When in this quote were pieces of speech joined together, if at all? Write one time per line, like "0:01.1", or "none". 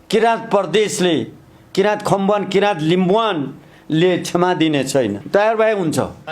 0:05.2